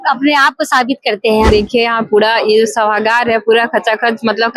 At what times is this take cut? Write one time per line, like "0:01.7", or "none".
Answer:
0:01.5